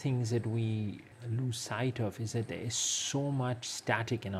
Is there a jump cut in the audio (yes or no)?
yes